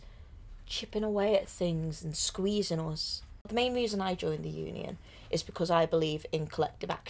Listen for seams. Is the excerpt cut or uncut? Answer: cut